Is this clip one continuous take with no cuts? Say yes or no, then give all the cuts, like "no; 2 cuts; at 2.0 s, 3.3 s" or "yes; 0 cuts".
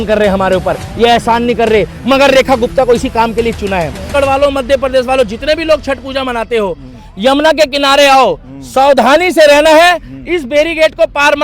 no; 1 cut; at 4.0 s